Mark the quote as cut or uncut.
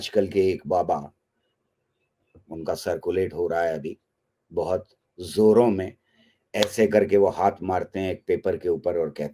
uncut